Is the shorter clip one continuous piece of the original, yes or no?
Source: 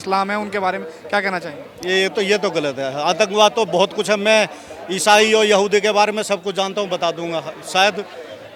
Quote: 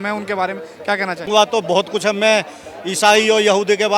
no